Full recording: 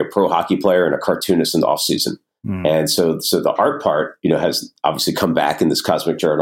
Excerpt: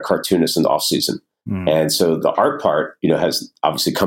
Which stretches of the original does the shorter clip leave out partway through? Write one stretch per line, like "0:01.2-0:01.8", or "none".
0:03.2-0:03.4